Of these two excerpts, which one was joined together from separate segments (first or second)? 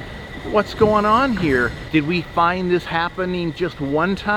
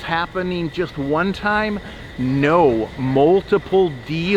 first